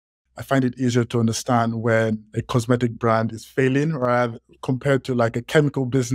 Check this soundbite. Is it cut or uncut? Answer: uncut